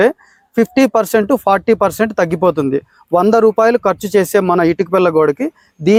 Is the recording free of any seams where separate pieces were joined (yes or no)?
yes